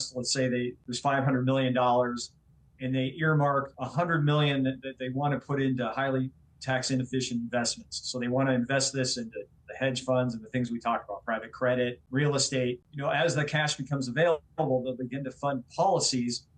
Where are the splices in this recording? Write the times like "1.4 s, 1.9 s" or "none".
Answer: 0.8 s, 3.8 s, 12.0 s, 12.9 s